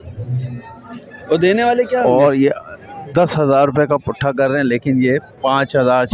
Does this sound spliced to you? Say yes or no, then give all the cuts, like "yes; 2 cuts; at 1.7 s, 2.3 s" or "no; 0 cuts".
yes; 1 cut; at 2.0 s